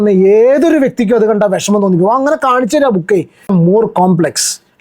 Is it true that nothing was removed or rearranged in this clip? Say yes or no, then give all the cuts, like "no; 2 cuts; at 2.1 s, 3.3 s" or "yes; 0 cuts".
no; 1 cut; at 3.5 s